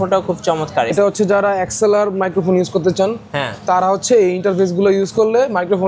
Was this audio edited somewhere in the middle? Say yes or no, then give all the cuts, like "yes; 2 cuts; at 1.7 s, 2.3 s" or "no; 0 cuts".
yes; 1 cut; at 0.9 s